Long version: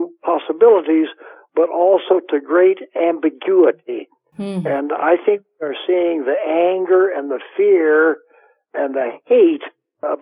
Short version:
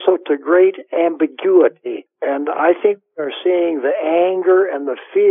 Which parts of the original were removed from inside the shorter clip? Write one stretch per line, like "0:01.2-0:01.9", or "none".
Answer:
0:04.1-0:04.5